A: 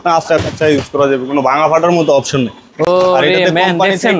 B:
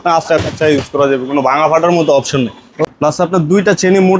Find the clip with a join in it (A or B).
B